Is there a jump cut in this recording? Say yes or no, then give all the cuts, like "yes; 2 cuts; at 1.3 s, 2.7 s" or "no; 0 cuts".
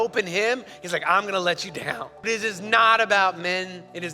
yes; 1 cut; at 2.3 s